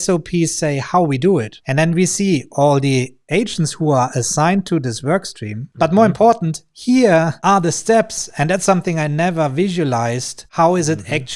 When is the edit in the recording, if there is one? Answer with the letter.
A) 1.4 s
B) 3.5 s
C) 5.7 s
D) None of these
C